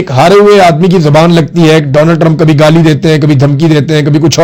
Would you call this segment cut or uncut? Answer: uncut